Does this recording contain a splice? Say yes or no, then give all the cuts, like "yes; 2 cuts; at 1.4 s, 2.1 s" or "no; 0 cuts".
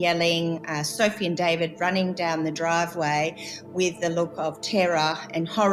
no; 0 cuts